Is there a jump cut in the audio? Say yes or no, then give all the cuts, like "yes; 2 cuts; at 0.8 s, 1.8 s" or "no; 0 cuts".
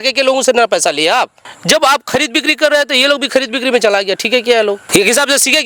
yes; 2 cuts; at 1.5 s, 4.8 s